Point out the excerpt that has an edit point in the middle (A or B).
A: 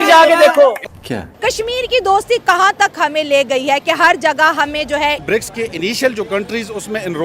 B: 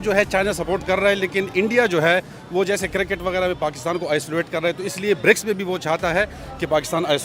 A